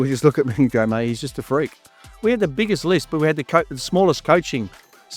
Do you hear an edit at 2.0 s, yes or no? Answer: yes